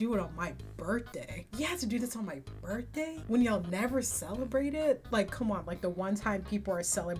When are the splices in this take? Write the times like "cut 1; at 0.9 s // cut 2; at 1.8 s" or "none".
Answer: cut 1; at 1.4 s